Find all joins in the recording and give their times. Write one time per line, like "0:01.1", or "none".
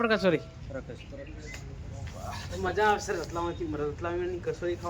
none